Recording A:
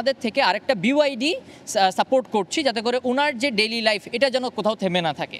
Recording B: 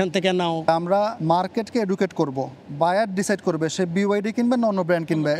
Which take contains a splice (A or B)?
B